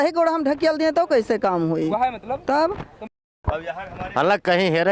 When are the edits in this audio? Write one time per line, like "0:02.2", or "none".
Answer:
0:03.1